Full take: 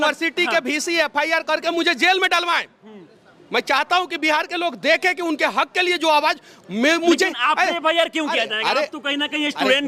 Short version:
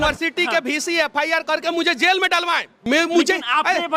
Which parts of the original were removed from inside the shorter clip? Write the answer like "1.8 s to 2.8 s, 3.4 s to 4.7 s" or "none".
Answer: 2.7 s to 6.6 s